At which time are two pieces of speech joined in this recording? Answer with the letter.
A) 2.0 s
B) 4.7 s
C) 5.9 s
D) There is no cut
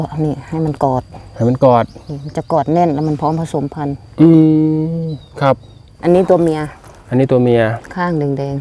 C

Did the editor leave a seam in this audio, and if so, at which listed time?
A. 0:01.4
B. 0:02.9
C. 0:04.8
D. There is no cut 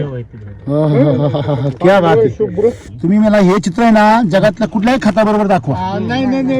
B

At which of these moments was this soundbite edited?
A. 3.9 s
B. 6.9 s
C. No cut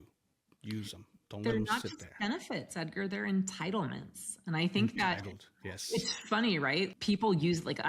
B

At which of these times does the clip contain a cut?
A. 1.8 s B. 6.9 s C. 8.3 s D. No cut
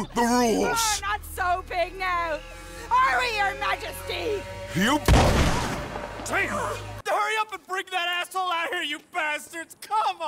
B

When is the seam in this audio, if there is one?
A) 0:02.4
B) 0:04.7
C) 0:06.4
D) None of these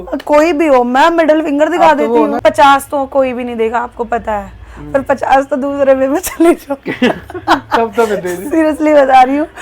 A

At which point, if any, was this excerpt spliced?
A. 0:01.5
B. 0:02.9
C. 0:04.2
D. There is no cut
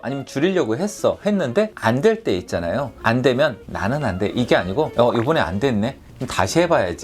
B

